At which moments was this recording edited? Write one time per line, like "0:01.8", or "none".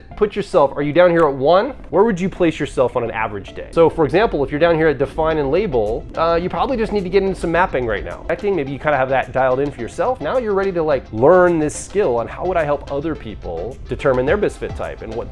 0:01.8
0:03.7
0:06.1
0:08.2
0:11.1
0:13.8